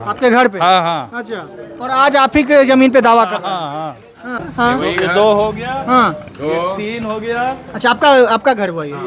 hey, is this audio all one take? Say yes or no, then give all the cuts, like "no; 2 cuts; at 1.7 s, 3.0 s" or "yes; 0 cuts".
no; 1 cut; at 4.4 s